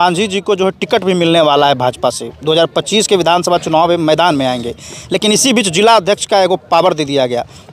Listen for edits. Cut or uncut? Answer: uncut